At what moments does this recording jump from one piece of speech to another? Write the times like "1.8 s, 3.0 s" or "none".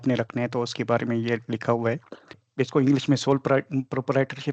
2.4 s